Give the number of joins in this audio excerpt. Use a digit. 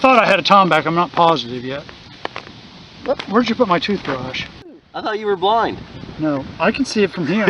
1